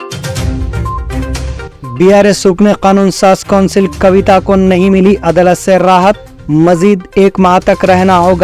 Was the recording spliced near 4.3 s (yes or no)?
no